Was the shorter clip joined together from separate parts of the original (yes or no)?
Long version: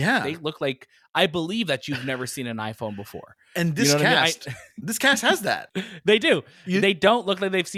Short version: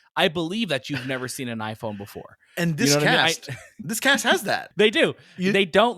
yes